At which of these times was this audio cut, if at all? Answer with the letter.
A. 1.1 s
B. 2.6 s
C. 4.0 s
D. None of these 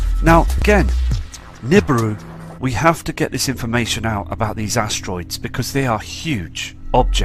D